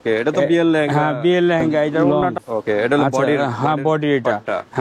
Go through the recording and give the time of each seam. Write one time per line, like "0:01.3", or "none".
0:02.0